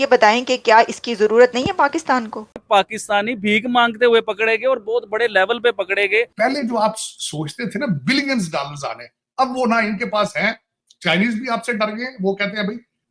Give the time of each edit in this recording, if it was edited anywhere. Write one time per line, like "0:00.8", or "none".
0:06.3